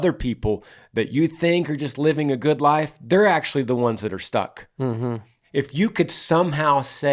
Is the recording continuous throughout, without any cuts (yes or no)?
no